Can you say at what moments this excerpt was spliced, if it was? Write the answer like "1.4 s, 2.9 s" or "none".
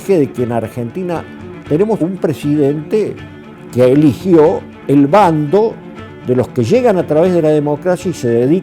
1.6 s